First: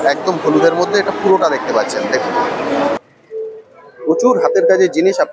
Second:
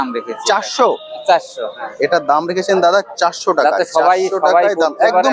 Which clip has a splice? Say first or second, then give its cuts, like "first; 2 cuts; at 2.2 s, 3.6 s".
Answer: first; 1 cut; at 3.0 s